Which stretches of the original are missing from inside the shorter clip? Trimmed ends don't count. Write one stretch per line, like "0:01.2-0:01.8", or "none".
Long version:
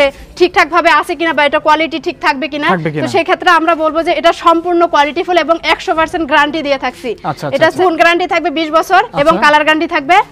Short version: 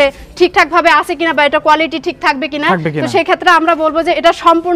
none